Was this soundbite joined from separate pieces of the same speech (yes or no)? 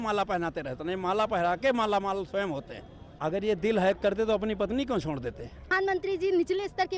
yes